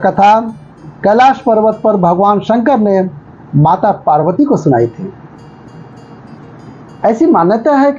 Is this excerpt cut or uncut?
cut